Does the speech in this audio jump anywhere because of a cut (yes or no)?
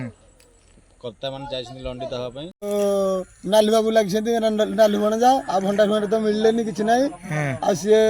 yes